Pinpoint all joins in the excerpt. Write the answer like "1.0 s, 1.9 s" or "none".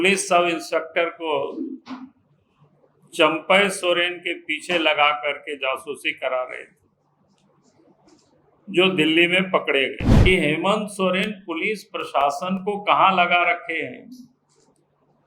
10.1 s